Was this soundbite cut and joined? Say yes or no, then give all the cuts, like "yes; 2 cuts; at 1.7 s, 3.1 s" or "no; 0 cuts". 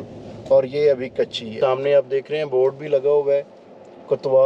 yes; 1 cut; at 1.6 s